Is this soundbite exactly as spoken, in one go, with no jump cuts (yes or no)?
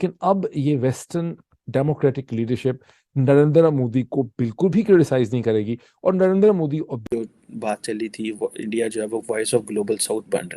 no